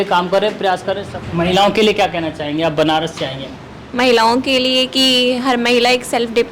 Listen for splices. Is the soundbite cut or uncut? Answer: cut